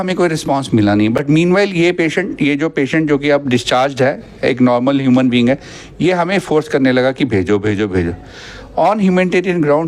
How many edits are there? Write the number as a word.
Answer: zero